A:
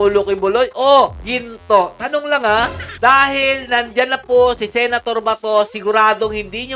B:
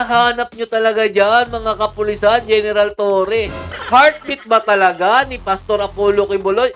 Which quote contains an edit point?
A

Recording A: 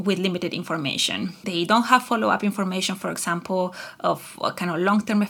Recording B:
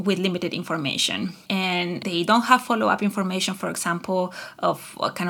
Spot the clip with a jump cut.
A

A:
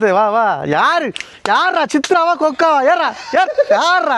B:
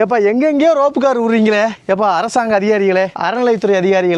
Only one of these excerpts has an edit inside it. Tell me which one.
B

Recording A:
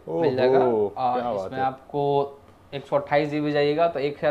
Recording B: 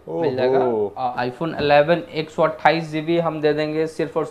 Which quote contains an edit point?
B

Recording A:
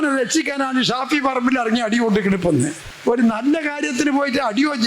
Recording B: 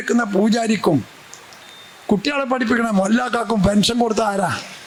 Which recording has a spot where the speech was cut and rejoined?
A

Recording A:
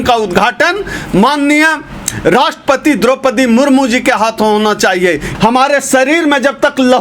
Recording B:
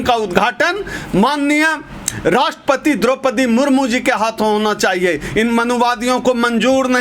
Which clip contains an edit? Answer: A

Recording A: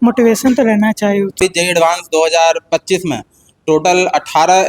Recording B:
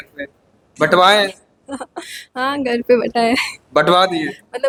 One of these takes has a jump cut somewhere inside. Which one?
A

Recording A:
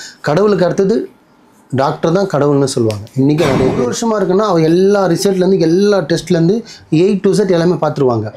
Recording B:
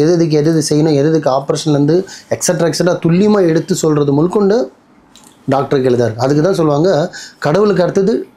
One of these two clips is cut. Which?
A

